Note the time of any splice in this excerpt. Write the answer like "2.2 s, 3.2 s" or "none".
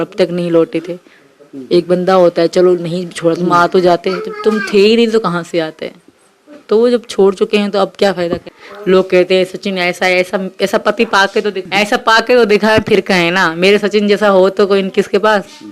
8.5 s